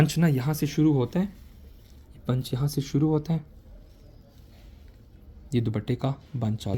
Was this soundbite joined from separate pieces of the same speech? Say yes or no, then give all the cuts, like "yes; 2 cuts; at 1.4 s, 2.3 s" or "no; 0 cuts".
no; 0 cuts